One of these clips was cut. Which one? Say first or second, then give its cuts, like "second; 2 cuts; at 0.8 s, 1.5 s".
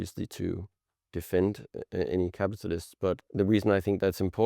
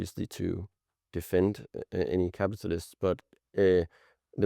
first; 1 cut; at 3.2 s